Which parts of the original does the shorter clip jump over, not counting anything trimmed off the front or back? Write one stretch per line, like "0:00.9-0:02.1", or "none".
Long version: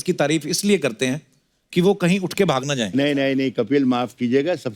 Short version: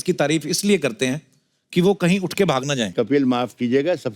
0:02.9-0:03.5